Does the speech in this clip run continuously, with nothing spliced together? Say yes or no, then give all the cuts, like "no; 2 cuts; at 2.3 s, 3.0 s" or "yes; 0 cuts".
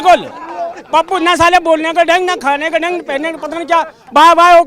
yes; 0 cuts